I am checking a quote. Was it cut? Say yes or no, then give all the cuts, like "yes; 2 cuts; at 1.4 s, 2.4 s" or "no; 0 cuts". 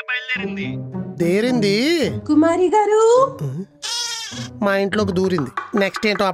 no; 0 cuts